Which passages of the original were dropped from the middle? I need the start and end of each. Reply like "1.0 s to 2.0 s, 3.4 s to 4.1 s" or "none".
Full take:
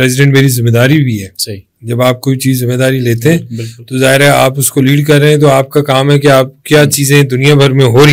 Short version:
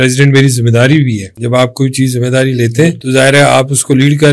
1.3 s to 1.8 s, 3.5 s to 3.9 s